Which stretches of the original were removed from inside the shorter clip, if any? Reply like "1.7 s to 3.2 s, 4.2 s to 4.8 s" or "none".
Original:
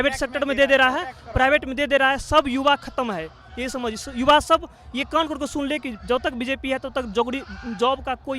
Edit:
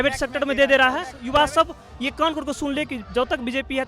1.1 s to 4.1 s